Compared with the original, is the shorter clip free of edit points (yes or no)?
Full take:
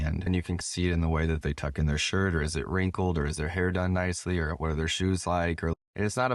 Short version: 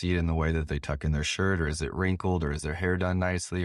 yes